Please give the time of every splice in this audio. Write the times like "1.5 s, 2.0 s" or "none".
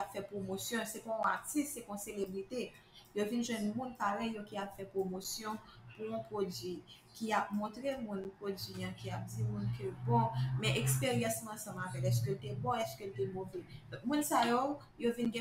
none